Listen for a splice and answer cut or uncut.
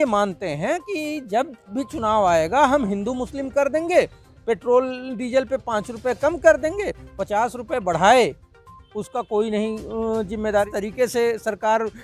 cut